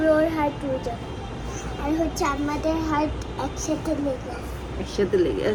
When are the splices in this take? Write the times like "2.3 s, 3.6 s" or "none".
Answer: none